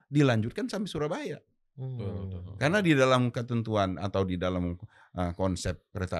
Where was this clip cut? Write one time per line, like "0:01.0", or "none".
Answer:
none